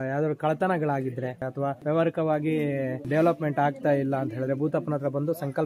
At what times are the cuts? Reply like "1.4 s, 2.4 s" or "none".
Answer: 1.6 s, 3.0 s